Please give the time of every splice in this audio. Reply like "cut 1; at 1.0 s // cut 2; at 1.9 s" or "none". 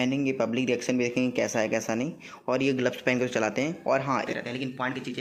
cut 1; at 4.3 s

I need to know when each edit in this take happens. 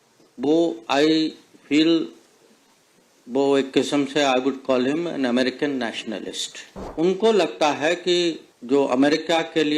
cut 1; at 6.8 s // cut 2; at 8.5 s

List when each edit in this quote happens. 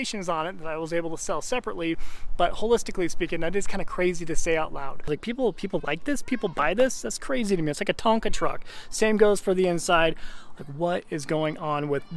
cut 1; at 5.1 s

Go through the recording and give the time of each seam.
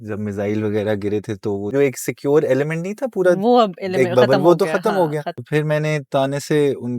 cut 1; at 1.7 s // cut 2; at 5.3 s

